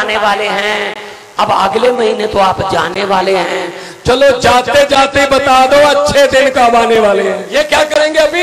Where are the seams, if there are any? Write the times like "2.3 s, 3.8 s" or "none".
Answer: 7.4 s